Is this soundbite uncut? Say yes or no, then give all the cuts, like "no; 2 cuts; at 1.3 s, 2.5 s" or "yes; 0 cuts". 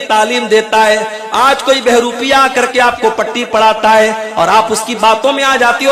yes; 0 cuts